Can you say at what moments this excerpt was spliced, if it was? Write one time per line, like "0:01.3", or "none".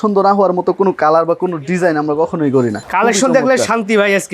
0:02.8